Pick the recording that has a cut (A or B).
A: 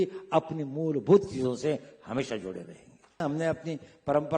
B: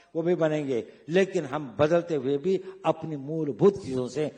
A